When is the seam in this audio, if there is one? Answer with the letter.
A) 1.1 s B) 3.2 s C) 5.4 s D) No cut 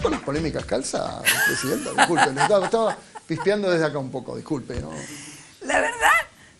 D